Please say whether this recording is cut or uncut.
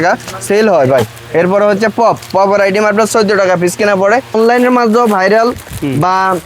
cut